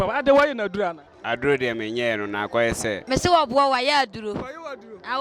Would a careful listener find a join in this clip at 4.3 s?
no; 2 cuts; at 1.1 s, 2.9 s

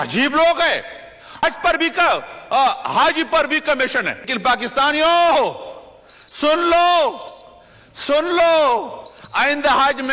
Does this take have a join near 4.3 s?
yes; 2 cuts; at 1.4 s, 4.3 s

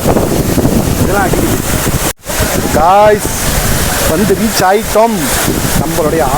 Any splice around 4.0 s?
no; 1 cut; at 2.1 s

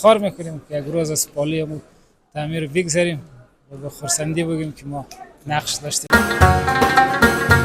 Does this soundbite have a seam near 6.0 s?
yes; 1 cut; at 6.0 s

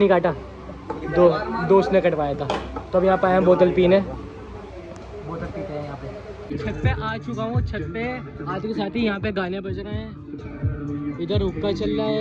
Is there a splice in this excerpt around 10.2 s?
no; 1 cut; at 6.3 s

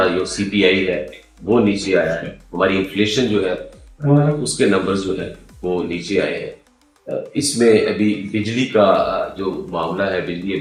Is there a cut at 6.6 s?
no; 0 cuts

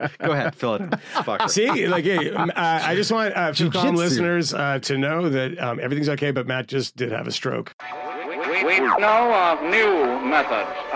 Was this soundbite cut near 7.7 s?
yes; 1 cut; at 7.7 s

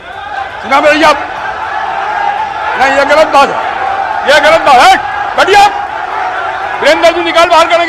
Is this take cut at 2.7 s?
no; 0 cuts

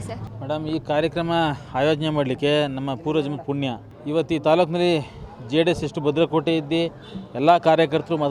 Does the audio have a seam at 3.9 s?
yes; 1 cut; at 3.9 s

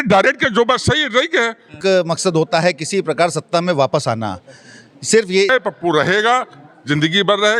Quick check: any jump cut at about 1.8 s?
yes; 2 cuts; at 1.8 s, 5.5 s

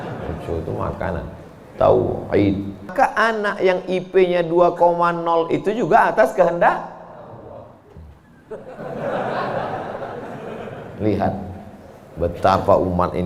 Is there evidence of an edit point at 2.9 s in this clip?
yes; 1 cut; at 2.9 s

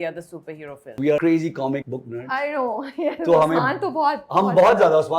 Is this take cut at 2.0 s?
yes; 2 cuts; at 0.9 s, 2.0 s

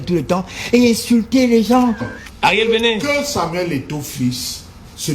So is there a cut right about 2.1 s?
yes; 1 cut; at 2.1 s

